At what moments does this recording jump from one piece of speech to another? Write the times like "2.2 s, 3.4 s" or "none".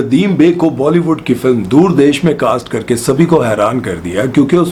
none